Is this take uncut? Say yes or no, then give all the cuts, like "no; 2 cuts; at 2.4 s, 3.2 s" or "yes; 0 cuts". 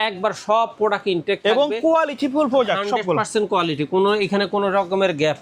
yes; 0 cuts